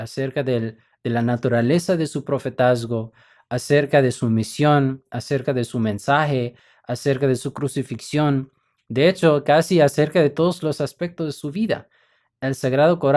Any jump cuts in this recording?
no; 0 cuts

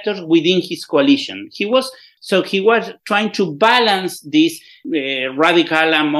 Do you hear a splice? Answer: yes; 2 cuts; at 2.1 s, 4.7 s

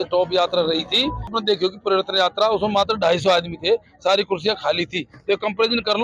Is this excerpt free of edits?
no; 1 cut; at 1.4 s

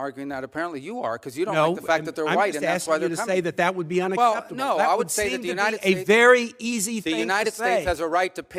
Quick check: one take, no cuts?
yes; 0 cuts

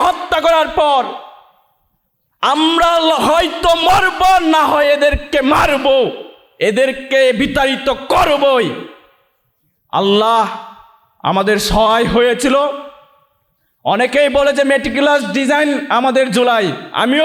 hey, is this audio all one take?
yes; 0 cuts

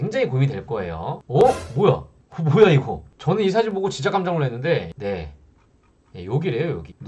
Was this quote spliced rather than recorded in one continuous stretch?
no; 0 cuts

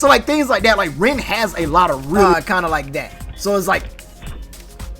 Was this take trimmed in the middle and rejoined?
yes; 1 cut; at 2.3 s

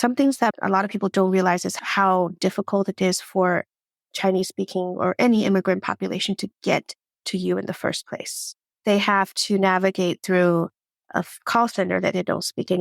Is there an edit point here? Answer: yes; 1 cut; at 1.8 s

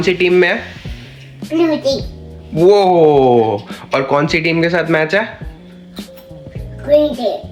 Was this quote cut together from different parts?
no; 0 cuts

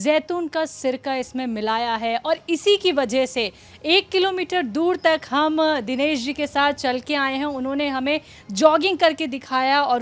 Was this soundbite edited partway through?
no; 0 cuts

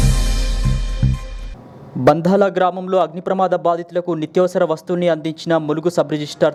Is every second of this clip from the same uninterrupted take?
yes; 0 cuts

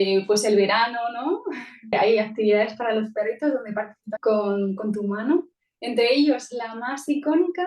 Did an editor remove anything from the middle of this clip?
yes; 2 cuts; at 1.9 s, 4.0 s

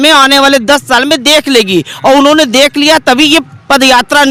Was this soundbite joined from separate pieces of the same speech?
no; 0 cuts

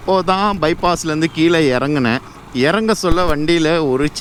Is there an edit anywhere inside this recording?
no; 0 cuts

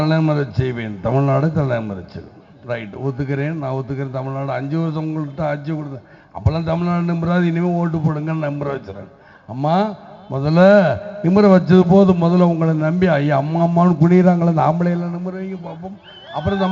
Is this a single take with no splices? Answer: yes; 0 cuts

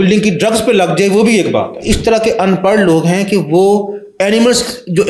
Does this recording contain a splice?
yes; 1 cut; at 1.8 s

